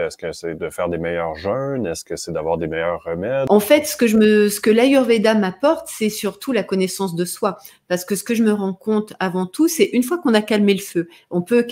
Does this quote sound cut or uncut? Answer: cut